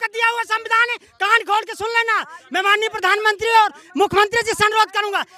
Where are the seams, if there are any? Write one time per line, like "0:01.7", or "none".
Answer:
none